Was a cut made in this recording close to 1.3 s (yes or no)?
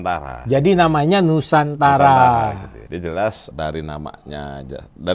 no